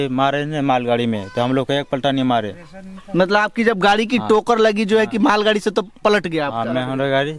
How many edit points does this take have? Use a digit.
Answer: 0